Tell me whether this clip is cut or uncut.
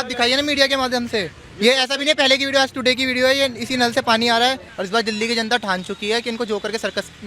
cut